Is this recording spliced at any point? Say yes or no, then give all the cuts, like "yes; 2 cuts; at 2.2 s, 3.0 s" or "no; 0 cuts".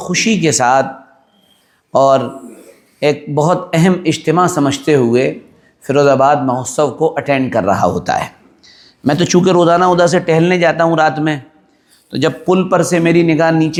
no; 0 cuts